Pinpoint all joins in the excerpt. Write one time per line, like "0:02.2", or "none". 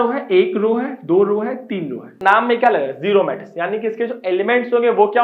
0:02.1